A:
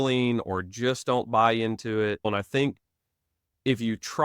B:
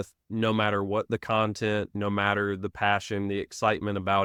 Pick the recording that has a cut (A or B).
A